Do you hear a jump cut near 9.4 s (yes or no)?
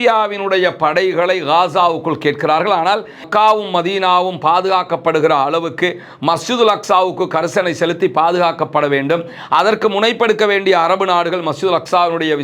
no